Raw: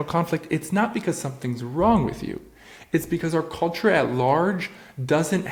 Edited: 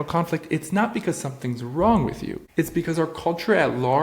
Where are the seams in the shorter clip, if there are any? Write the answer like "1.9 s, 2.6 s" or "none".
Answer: 2.3 s